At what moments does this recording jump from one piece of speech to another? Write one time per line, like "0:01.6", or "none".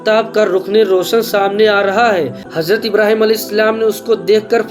0:02.5